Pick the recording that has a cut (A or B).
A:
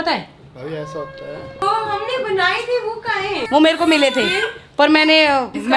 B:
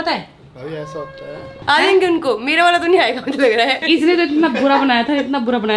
B